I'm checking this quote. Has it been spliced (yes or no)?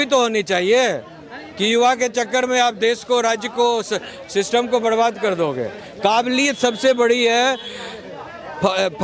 no